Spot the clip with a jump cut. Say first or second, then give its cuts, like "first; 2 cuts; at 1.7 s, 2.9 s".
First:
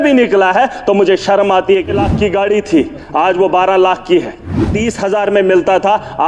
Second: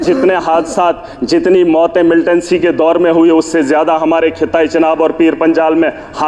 first; 2 cuts; at 1.9 s, 4.7 s